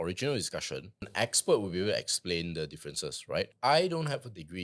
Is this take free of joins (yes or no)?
no